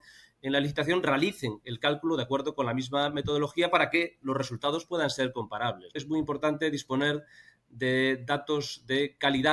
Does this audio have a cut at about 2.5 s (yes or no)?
no